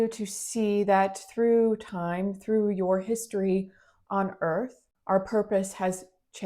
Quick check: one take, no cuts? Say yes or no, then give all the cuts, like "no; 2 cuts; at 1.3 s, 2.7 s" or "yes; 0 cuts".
no; 1 cut; at 4.9 s